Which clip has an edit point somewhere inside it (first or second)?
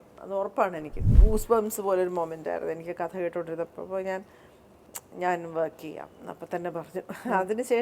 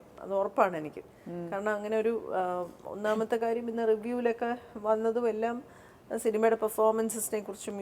first